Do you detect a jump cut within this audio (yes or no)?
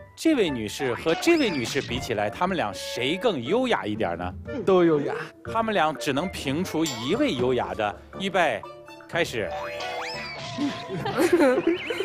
no